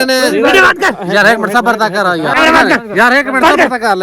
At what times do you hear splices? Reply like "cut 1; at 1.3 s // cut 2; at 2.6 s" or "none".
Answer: cut 1; at 2.4 s